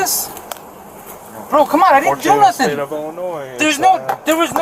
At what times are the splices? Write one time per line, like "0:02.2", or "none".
none